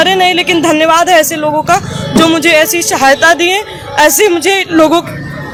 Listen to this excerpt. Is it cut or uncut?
uncut